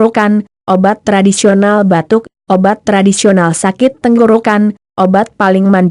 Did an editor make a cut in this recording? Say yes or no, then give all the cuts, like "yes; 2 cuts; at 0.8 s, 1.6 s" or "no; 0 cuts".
no; 0 cuts